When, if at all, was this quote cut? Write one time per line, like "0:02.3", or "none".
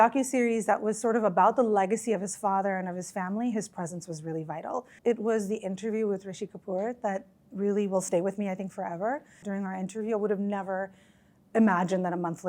0:04.9
0:09.4